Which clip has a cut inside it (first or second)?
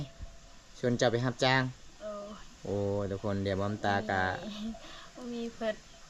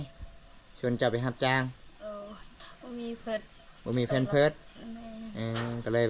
second